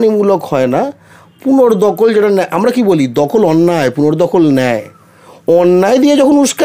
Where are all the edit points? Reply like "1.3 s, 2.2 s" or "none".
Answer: none